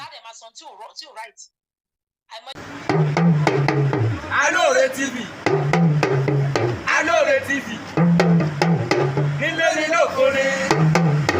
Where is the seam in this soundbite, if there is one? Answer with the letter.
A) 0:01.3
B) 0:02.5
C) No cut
B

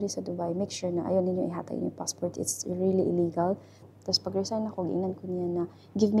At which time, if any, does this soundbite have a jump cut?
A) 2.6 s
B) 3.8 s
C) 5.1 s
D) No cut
B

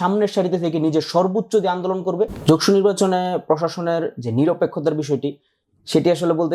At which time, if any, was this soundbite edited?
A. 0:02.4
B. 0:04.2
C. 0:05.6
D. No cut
A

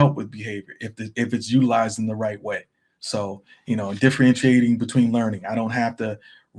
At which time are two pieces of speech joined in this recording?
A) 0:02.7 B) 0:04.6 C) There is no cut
C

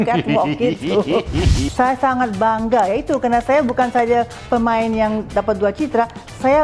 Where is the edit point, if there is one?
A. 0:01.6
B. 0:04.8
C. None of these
A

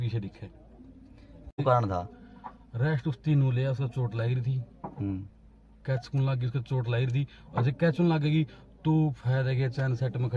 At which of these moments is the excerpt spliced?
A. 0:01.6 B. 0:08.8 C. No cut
A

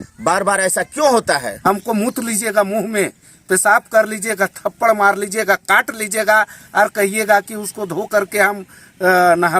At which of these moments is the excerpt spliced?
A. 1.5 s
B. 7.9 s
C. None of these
A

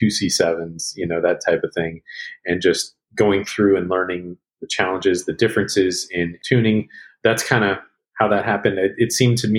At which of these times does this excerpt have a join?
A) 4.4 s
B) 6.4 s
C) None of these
B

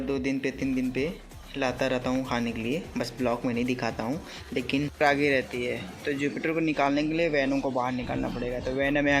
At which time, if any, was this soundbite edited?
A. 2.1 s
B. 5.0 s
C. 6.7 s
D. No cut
B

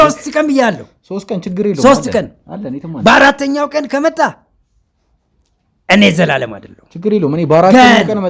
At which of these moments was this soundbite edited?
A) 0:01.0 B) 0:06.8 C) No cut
C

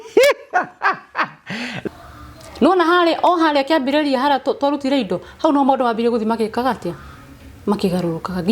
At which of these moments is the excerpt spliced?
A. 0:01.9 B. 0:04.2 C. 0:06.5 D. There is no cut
A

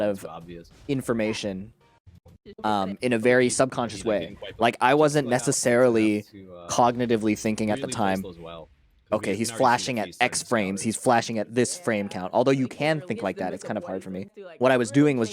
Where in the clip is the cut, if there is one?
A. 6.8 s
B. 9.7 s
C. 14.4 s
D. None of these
C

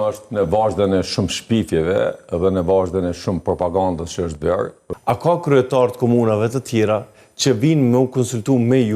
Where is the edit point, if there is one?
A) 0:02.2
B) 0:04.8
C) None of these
B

